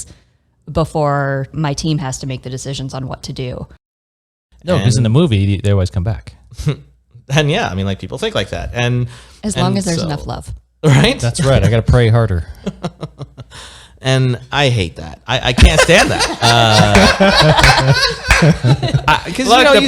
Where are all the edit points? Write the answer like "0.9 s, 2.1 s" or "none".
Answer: 1.5 s, 4.1 s